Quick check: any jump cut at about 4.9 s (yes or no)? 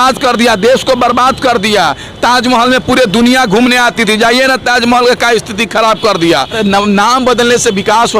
no